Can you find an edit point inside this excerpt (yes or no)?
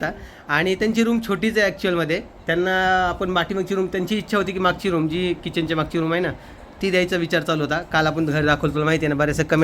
no